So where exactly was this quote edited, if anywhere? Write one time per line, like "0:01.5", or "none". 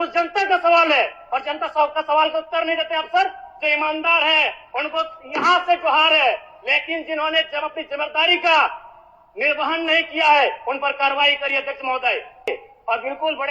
0:12.5